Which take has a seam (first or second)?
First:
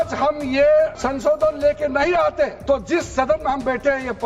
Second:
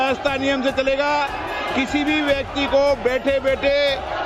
first